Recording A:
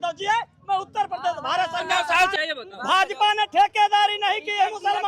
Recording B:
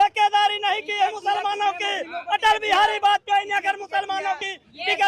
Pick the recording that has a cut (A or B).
A